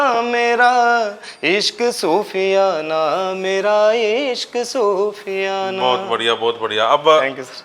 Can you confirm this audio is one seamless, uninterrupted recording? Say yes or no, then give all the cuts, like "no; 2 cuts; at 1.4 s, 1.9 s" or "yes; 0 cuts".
yes; 0 cuts